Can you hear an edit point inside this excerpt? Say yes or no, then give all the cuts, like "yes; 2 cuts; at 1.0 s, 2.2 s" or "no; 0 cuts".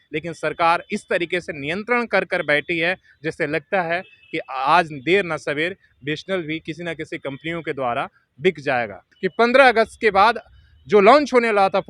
yes; 1 cut; at 9.2 s